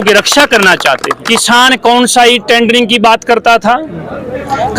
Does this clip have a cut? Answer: yes; 1 cut; at 1.2 s

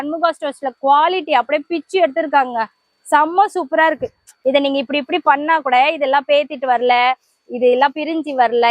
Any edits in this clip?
yes; 1 cut; at 4.2 s

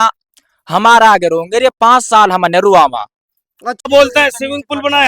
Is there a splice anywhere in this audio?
yes; 1 cut; at 3.9 s

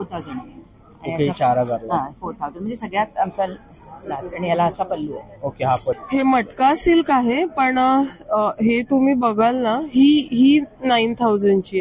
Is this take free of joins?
no; 1 cut; at 6.0 s

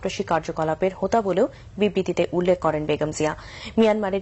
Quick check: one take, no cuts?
yes; 0 cuts

